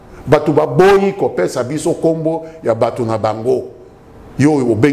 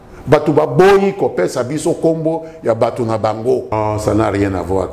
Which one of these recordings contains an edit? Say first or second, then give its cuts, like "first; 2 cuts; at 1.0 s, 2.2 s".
second; 1 cut; at 3.7 s